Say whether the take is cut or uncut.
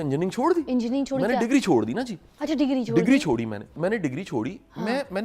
cut